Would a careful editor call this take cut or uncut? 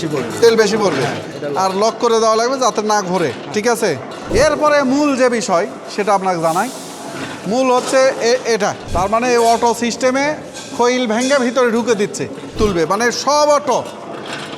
cut